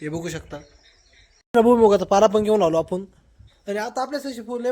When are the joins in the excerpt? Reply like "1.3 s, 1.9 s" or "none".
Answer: 1.5 s